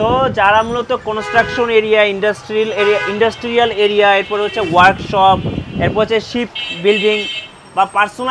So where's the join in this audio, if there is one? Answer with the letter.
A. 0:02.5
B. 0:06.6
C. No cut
C